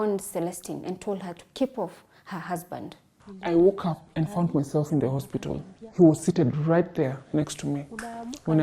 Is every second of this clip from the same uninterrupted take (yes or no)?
no